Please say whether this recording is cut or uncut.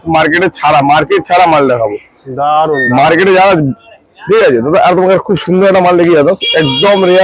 uncut